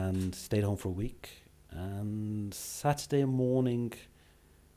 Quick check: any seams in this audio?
no; 0 cuts

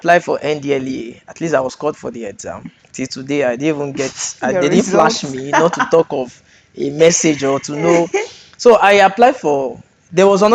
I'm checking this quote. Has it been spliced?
no; 0 cuts

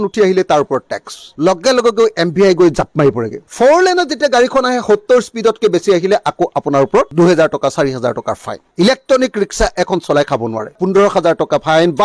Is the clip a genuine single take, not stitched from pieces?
no; 3 cuts; at 1.4 s, 3.5 s, 8.7 s

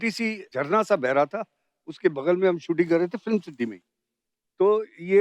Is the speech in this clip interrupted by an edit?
no; 0 cuts

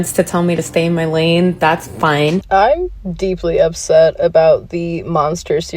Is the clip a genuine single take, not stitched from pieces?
no; 1 cut; at 2.4 s

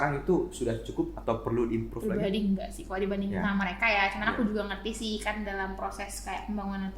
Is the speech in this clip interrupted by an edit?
no; 0 cuts

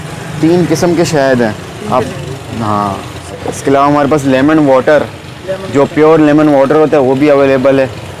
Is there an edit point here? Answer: yes; 1 cut; at 3.4 s

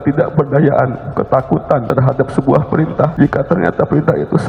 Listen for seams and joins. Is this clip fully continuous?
no; 2 cuts; at 1.9 s, 3.1 s

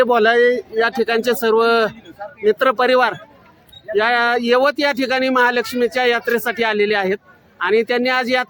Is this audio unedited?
yes; 0 cuts

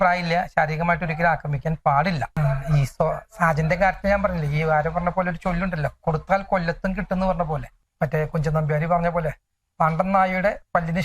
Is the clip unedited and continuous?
no; 2 cuts; at 2.3 s, 7.8 s

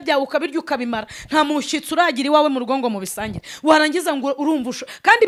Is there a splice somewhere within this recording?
no; 0 cuts

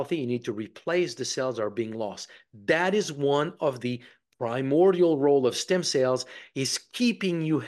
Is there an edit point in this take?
no; 0 cuts

